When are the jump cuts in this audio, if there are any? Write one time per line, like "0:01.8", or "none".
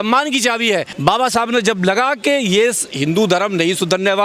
0:00.9